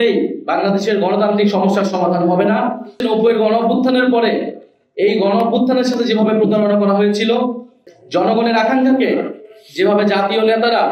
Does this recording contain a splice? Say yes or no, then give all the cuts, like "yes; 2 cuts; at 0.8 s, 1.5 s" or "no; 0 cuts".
yes; 1 cut; at 3.0 s